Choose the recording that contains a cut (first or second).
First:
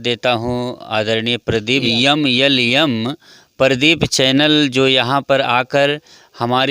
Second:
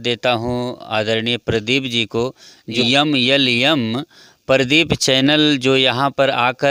first